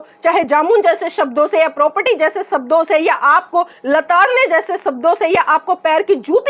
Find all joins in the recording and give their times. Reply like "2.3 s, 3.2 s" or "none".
none